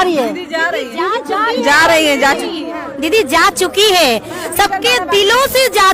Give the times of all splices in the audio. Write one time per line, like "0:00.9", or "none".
none